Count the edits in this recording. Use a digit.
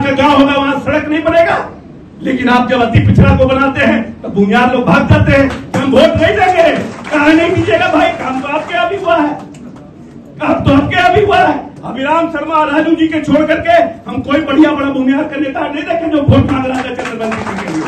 0